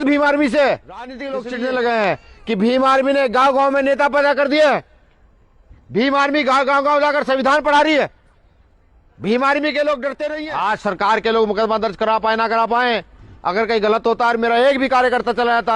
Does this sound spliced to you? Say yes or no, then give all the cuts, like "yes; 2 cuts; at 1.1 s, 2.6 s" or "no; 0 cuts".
yes; 2 cuts; at 1.3 s, 10.4 s